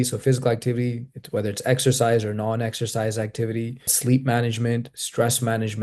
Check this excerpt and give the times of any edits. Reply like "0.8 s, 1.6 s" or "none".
3.9 s